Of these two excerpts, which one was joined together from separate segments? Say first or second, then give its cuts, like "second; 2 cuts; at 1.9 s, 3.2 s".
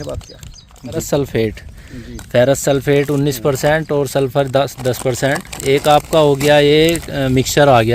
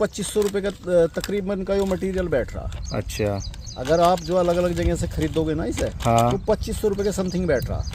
first; 1 cut; at 1.0 s